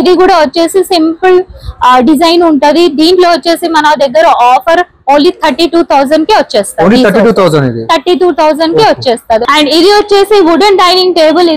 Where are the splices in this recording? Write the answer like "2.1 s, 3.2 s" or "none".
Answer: 9.4 s